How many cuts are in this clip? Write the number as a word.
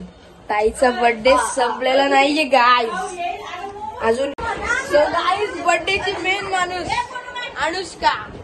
one